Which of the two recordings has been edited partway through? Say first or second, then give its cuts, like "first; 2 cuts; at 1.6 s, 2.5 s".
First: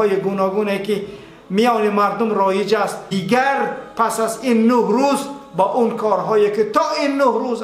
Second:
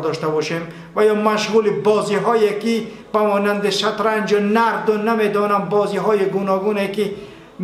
first; 1 cut; at 3.0 s